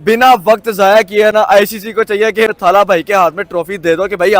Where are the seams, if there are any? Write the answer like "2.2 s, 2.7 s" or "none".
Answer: 2.5 s